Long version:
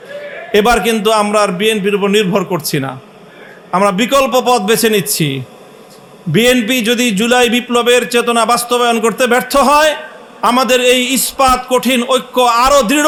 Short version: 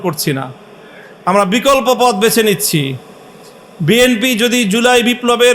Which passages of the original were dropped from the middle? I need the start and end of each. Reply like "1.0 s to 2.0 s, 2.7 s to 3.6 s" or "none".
none